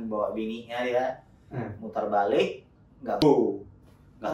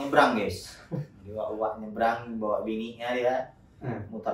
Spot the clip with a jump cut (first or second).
first